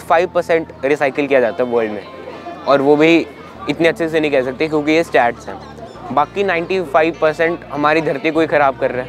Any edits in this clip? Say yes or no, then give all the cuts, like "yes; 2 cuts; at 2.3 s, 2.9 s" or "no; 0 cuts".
no; 0 cuts